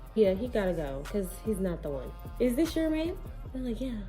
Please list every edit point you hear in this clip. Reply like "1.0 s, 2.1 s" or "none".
2.2 s

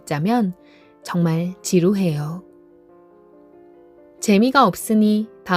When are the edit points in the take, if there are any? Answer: 2.4 s, 4.2 s

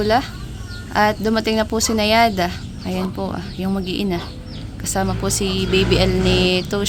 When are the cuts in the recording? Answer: none

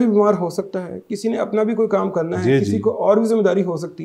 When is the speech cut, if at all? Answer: none

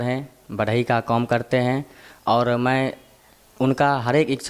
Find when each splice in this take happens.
none

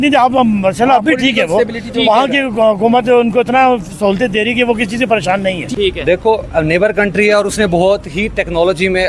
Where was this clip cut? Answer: 5.6 s

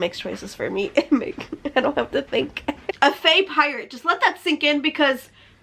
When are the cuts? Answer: 2.9 s

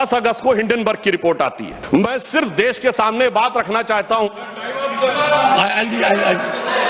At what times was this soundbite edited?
1.7 s

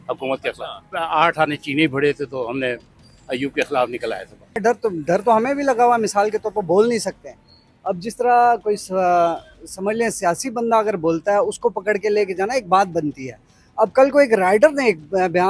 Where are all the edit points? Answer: 0.9 s, 4.6 s

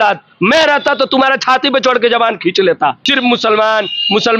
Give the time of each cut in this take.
3.1 s

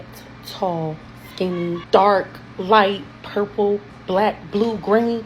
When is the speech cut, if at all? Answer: 1.8 s

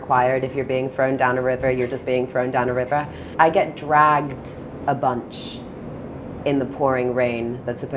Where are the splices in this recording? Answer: 3.2 s

